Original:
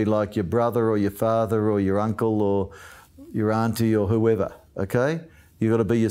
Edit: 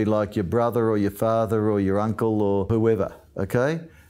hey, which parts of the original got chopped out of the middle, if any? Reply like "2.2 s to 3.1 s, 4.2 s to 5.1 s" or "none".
2.7 s to 4.1 s